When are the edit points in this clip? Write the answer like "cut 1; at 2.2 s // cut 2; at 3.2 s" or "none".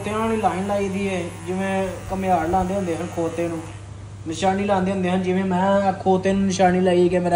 none